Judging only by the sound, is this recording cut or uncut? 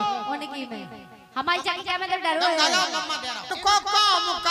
cut